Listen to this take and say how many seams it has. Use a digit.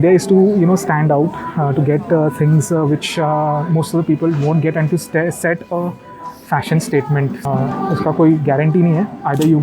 1